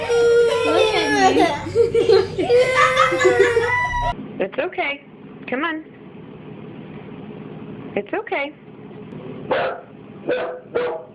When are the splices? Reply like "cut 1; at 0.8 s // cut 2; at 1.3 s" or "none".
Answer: cut 1; at 4.2 s // cut 2; at 9.1 s